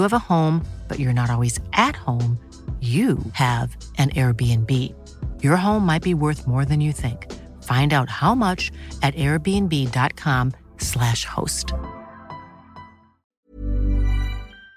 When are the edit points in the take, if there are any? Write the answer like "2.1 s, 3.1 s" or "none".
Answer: 13.5 s